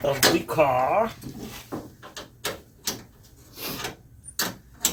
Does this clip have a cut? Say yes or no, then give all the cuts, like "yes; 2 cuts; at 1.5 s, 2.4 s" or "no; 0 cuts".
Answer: no; 0 cuts